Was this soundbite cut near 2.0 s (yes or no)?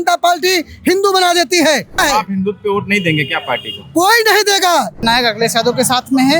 yes